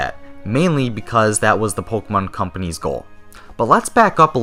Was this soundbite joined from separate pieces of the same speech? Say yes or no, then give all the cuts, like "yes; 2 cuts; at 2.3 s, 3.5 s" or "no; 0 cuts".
no; 0 cuts